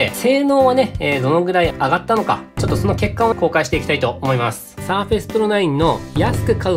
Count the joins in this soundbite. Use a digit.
2